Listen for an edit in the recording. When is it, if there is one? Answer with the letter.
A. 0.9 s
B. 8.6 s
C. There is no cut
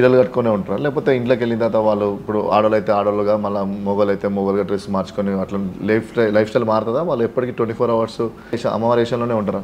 B